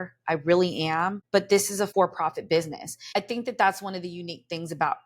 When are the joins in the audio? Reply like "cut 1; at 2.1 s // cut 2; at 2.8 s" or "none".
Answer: cut 1; at 1.6 s // cut 2; at 3.1 s